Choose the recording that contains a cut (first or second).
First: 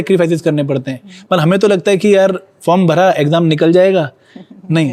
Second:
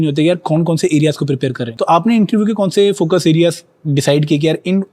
second